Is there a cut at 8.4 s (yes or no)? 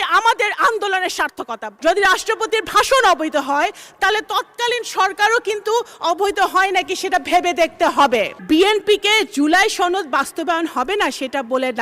yes